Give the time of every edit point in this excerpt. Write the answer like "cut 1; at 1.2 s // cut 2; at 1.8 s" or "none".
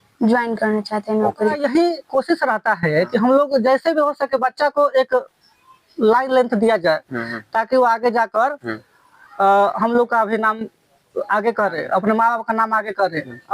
cut 1; at 1.5 s